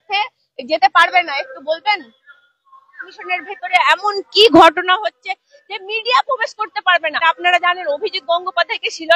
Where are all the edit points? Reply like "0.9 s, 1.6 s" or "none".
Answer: 3.1 s, 7.2 s